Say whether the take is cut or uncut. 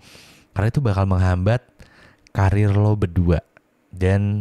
uncut